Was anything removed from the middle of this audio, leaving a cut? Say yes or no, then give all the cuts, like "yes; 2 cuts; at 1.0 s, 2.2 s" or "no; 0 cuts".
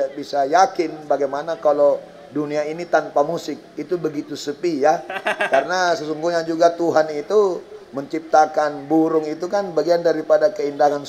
no; 0 cuts